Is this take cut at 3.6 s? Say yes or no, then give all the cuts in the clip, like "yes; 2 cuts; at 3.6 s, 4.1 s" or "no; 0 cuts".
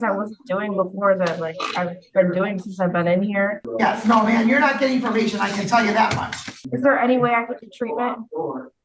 yes; 2 cuts; at 3.6 s, 6.7 s